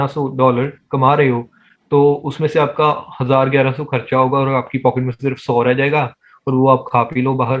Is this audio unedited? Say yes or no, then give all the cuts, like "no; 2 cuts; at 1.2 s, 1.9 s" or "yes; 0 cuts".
yes; 0 cuts